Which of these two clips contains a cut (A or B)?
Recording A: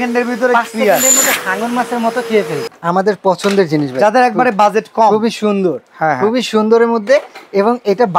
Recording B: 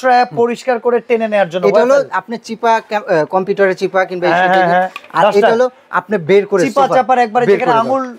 A